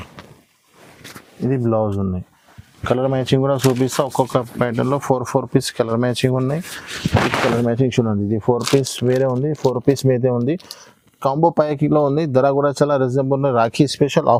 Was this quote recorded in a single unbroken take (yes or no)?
yes